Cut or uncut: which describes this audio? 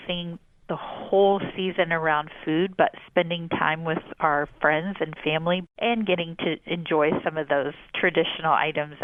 uncut